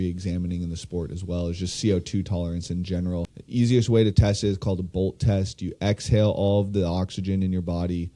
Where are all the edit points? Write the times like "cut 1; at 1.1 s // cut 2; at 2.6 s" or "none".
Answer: cut 1; at 3.4 s